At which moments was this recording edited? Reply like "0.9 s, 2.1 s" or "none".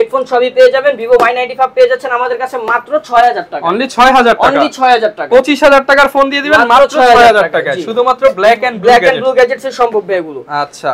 none